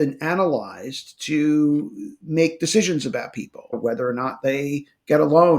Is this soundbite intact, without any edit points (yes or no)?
no